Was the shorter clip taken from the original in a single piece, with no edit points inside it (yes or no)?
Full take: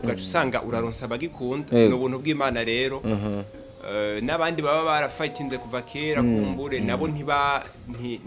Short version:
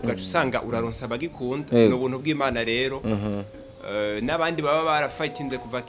yes